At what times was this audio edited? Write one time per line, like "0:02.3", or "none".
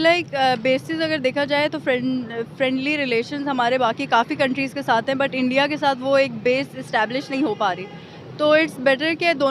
none